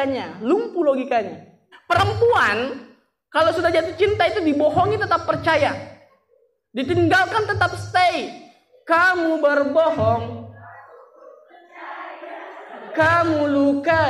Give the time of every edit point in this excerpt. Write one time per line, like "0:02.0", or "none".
0:01.7